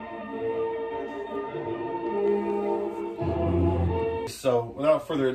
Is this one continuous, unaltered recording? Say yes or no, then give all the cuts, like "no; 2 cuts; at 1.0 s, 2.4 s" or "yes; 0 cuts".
no; 1 cut; at 4.3 s